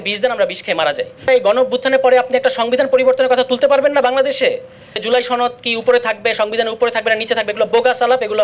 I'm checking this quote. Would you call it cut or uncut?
cut